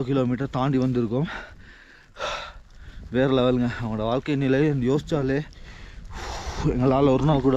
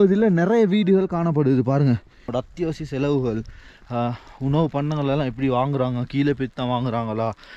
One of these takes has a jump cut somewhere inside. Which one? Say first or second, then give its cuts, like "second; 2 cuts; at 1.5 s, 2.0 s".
second; 1 cut; at 2.3 s